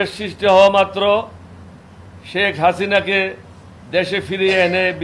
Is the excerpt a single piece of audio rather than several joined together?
yes; 0 cuts

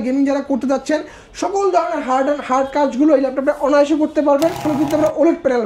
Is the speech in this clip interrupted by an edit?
yes; 1 cut; at 4.6 s

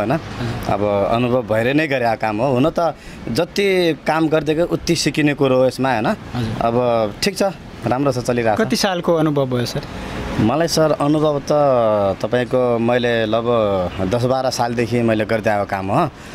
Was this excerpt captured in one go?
yes; 0 cuts

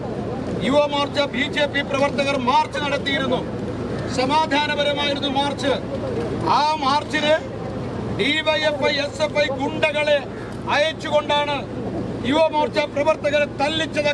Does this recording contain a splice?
no; 0 cuts

